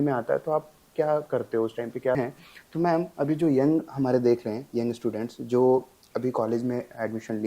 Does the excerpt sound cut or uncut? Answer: cut